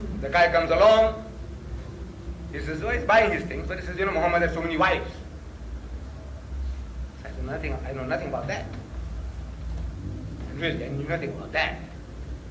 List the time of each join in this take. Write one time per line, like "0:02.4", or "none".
0:07.3